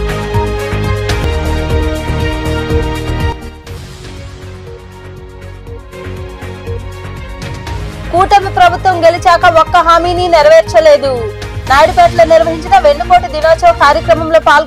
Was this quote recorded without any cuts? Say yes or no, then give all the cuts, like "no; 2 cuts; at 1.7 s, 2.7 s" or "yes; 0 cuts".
no; 1 cut; at 1.2 s